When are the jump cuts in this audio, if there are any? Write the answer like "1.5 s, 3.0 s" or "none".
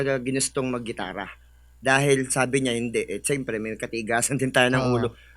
none

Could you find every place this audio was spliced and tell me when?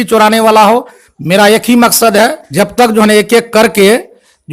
2.4 s

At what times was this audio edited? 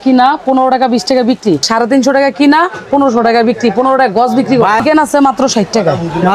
1.7 s, 4.8 s

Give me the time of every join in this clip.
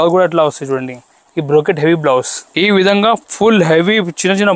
2.4 s

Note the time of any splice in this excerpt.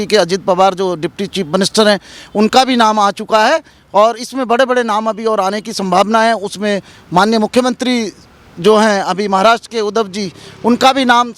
none

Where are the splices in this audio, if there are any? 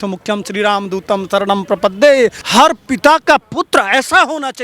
2.4 s

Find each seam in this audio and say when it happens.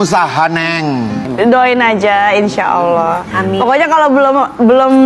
1.2 s

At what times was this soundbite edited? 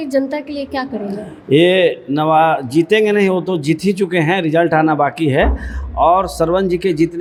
none

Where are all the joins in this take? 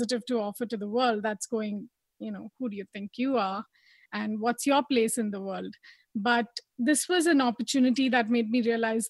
none

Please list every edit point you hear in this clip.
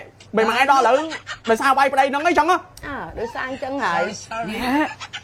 none

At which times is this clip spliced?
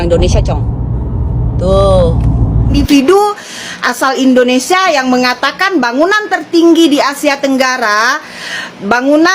2.8 s

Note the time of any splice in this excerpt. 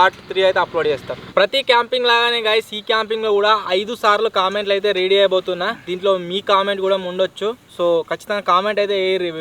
1.2 s

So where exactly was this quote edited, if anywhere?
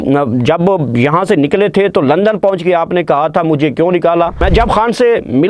4.4 s

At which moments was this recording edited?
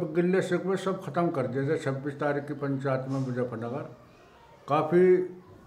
none

